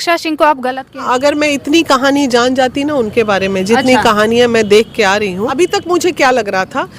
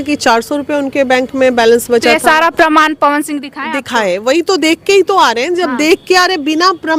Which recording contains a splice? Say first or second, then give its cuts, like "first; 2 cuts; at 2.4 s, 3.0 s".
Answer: first; 2 cuts; at 1.1 s, 5.5 s